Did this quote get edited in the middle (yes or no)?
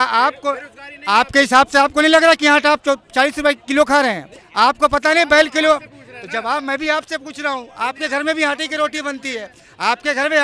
no